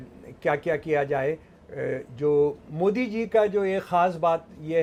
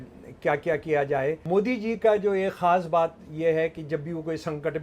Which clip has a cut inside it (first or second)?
second